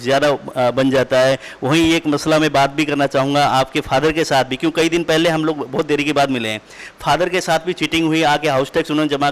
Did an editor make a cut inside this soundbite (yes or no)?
no